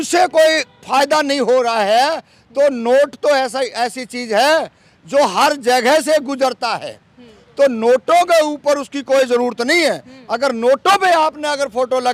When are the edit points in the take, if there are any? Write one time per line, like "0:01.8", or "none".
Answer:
none

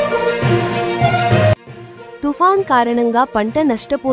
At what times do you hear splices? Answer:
0:01.6

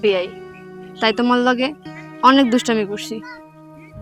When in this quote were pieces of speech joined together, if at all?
none

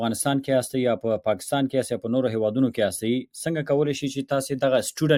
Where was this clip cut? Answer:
none

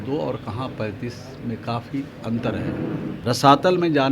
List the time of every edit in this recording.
0:03.2

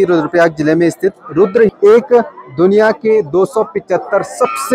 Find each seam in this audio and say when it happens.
0:01.7

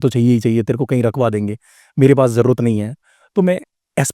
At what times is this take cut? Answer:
none

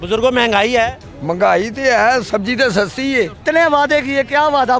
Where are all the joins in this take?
0:01.1
0:03.4

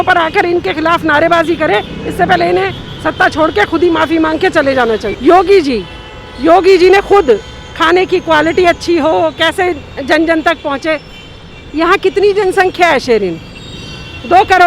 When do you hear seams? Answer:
0:05.1

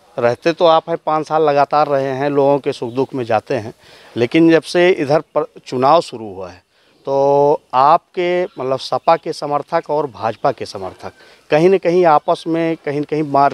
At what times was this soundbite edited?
none

